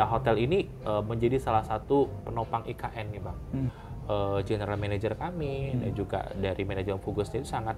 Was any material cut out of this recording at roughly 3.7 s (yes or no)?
yes